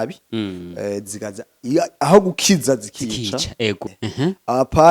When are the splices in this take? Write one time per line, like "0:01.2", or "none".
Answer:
0:03.8